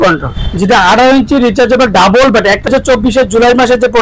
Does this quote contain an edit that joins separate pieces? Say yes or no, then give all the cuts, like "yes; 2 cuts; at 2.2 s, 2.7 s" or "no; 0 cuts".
yes; 1 cut; at 2.7 s